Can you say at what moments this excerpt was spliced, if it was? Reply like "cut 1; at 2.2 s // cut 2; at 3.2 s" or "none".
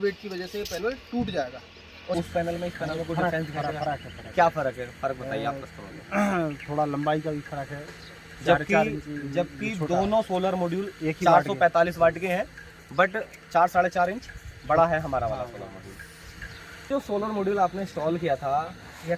cut 1; at 2.1 s // cut 2; at 16.9 s